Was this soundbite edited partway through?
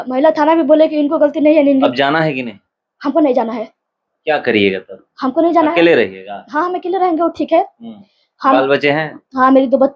yes; 1 cut; at 1.9 s

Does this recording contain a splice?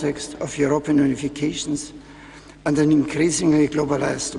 yes; 1 cut; at 1.8 s

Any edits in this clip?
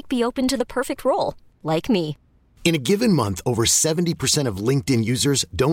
no; 0 cuts

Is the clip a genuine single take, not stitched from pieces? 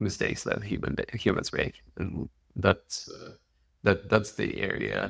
yes; 0 cuts

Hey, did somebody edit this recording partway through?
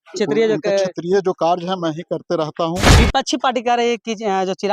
yes; 1 cut; at 2.9 s

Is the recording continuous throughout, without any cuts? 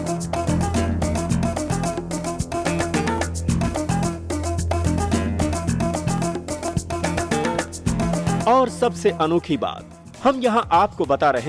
no; 1 cut; at 8.4 s

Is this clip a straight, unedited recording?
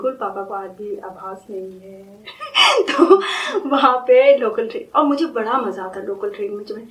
yes; 0 cuts

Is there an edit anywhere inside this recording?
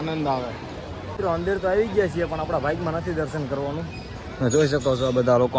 yes; 1 cut; at 1.0 s

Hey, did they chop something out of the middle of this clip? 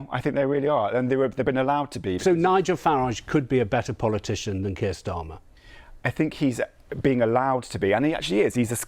yes; 1 cut; at 2.2 s

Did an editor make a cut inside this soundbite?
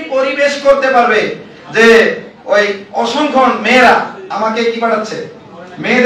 no; 0 cuts

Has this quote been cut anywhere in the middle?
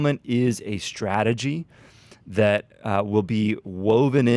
no; 0 cuts

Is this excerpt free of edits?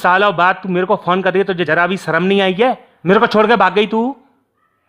no; 2 cuts; at 1.6 s, 2.9 s

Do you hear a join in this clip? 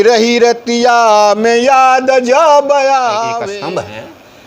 yes; 1 cut; at 3.3 s

